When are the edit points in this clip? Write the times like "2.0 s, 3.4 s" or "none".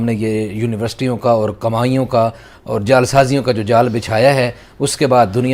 none